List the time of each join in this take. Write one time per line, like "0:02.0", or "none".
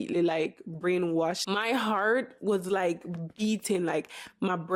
0:01.4